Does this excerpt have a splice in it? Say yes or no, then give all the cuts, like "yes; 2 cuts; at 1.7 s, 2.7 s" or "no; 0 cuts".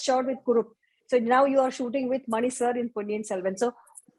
no; 0 cuts